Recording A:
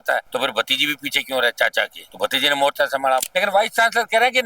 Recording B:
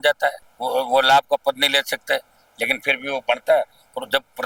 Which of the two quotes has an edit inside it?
A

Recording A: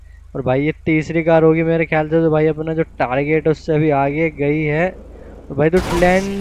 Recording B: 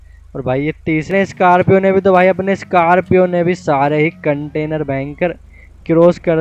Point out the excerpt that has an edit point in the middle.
B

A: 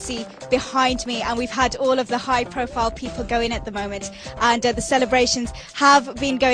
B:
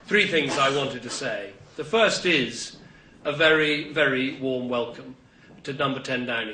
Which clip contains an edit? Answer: B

